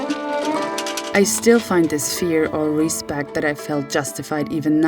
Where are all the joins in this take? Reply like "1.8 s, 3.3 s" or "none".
1.0 s